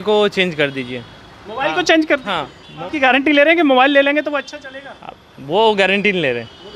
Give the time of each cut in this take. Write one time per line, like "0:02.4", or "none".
0:02.7

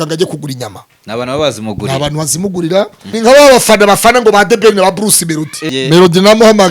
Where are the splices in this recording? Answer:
0:03.0
0:05.7

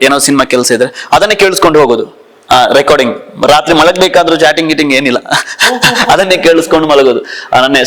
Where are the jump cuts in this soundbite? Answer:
none

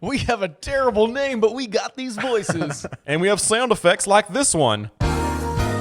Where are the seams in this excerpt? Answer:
0:04.9

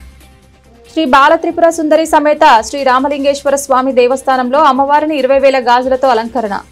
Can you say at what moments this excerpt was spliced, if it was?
0:00.9

